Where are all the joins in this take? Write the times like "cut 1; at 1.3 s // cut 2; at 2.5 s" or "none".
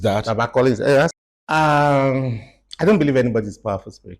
cut 1; at 1.3 s